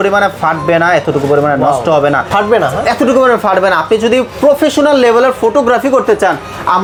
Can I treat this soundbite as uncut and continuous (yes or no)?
yes